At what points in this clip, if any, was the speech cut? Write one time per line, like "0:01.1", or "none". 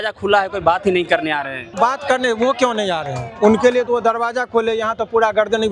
0:01.8